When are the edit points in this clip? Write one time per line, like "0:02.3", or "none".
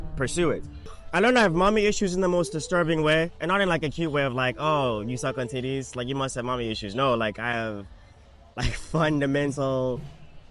0:00.9